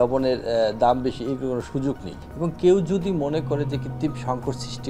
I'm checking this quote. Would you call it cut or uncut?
uncut